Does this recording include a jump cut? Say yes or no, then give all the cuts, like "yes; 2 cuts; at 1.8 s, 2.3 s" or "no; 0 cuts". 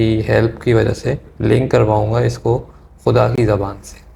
no; 0 cuts